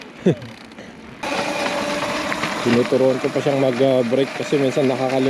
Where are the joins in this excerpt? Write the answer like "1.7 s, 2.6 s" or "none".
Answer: 1.2 s